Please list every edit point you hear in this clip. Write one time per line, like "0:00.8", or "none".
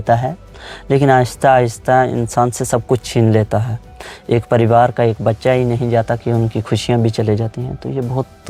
none